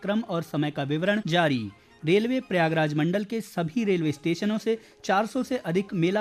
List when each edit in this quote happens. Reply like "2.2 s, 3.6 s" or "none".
1.2 s